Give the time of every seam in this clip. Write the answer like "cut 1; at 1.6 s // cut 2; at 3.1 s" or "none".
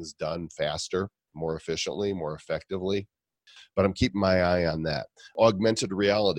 cut 1; at 3.6 s // cut 2; at 5.3 s